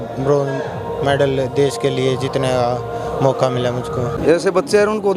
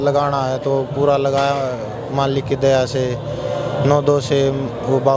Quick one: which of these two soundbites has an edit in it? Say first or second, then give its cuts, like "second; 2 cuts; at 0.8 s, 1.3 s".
first; 1 cut; at 4.2 s